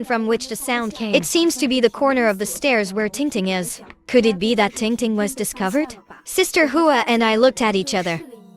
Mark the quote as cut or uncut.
cut